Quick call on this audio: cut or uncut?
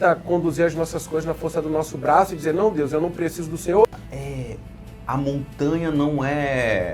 cut